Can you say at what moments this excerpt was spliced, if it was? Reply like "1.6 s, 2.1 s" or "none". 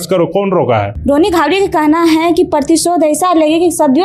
0.9 s